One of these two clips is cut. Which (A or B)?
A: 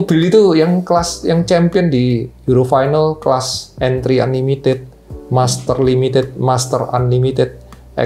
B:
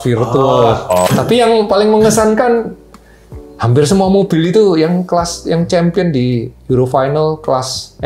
B